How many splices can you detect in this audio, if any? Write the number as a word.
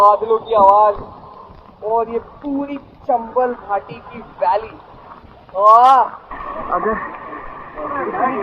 one